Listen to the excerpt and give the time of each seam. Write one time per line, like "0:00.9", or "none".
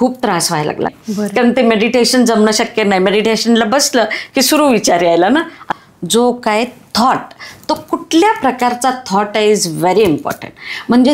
0:01.0
0:05.6